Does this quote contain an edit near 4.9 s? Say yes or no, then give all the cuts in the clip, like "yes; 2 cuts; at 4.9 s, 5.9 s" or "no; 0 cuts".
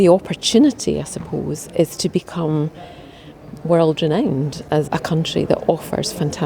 yes; 1 cut; at 4.9 s